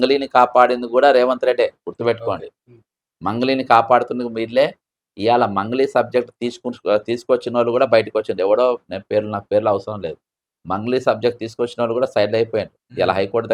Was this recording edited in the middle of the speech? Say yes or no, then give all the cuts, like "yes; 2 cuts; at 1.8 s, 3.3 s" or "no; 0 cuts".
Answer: no; 0 cuts